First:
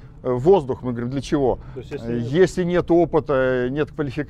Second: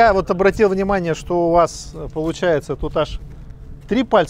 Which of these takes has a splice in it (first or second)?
first